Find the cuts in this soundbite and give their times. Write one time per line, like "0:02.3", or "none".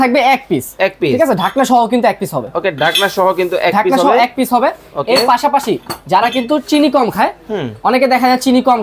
none